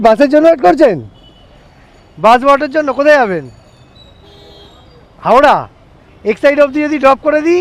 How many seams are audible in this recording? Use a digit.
0